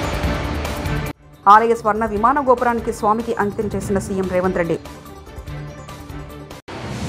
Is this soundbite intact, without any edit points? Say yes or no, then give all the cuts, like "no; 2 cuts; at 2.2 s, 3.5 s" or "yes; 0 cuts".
no; 1 cut; at 1.2 s